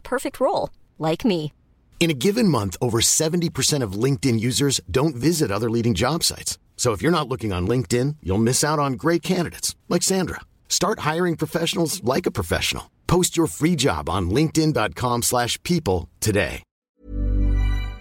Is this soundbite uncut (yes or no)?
no